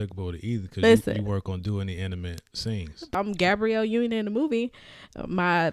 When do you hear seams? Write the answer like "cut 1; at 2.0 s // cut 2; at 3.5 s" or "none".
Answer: cut 1; at 3.0 s